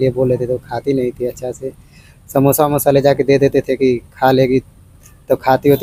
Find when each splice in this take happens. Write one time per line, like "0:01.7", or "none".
none